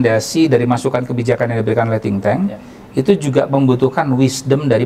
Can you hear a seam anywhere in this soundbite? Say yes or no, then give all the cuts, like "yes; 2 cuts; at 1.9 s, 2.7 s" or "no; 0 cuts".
no; 0 cuts